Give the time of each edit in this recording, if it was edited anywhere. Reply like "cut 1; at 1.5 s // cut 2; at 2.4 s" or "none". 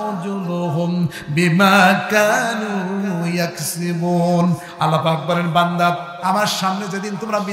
none